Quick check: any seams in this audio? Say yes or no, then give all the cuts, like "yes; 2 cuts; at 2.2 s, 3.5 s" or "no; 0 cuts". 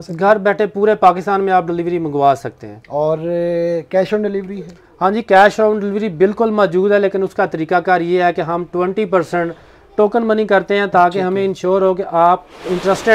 no; 0 cuts